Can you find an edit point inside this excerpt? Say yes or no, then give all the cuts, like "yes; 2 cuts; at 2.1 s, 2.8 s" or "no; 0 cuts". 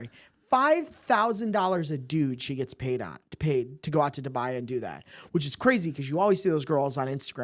no; 0 cuts